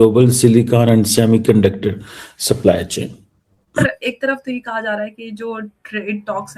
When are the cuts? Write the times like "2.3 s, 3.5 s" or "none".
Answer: 3.8 s